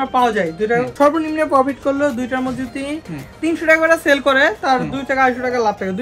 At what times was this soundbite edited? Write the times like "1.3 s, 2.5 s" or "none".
none